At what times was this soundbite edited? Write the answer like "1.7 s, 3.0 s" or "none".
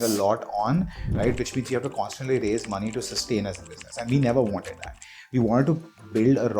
1.0 s